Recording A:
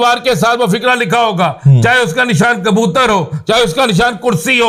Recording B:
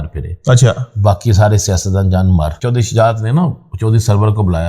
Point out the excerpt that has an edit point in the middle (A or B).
B